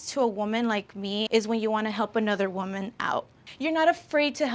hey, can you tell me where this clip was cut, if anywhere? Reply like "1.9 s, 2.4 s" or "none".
1.3 s, 3.4 s